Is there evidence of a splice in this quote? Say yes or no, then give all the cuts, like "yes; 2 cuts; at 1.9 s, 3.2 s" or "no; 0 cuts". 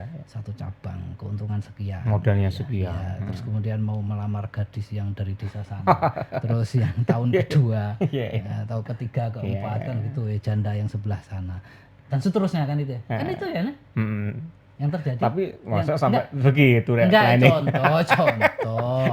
no; 0 cuts